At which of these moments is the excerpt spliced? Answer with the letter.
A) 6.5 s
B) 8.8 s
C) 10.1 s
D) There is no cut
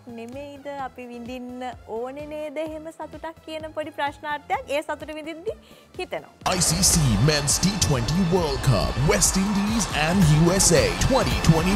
A